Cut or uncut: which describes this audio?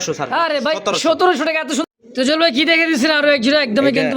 cut